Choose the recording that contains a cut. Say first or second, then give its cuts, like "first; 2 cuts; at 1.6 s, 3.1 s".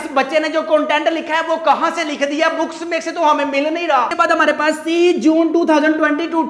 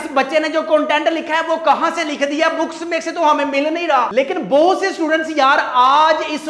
second; 1 cut; at 4.1 s